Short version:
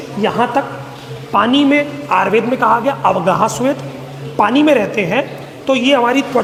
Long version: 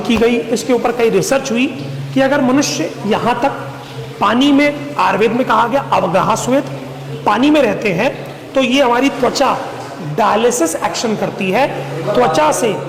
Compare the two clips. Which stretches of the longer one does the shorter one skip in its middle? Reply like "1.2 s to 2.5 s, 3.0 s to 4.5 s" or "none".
none